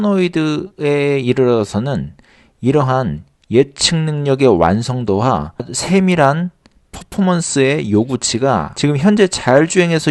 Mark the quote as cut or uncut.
cut